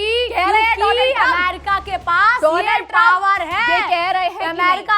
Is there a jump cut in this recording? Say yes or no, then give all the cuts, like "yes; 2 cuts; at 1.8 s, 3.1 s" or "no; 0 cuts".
no; 0 cuts